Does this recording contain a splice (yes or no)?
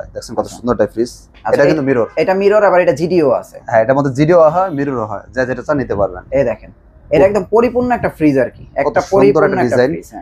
no